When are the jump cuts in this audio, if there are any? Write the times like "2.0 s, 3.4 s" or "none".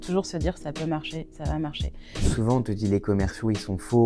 2.2 s